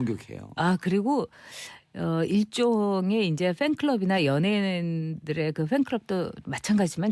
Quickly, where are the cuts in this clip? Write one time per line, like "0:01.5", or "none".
none